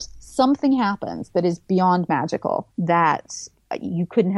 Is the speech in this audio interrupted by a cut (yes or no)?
yes